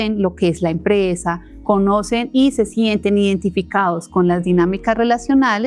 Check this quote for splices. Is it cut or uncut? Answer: uncut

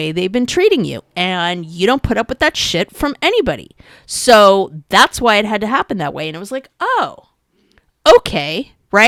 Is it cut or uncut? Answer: uncut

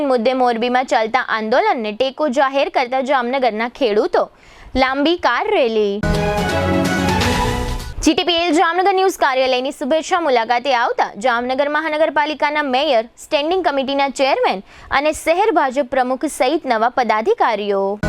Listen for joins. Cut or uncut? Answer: uncut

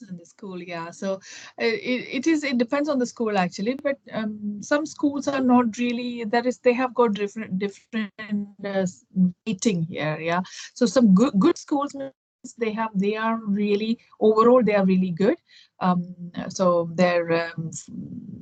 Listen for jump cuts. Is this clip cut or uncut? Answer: uncut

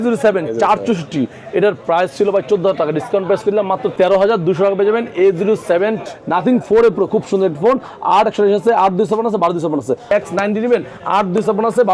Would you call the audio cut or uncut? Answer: cut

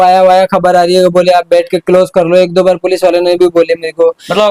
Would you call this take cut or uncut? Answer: uncut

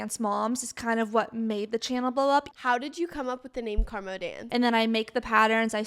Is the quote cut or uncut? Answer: cut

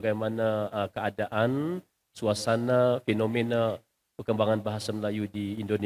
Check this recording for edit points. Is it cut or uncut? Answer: uncut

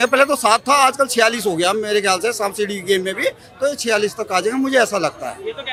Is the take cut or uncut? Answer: uncut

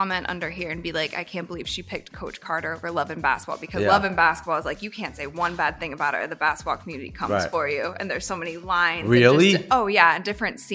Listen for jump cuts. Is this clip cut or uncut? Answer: uncut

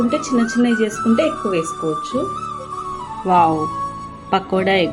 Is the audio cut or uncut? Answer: cut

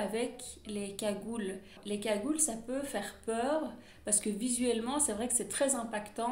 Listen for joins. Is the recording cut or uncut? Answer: cut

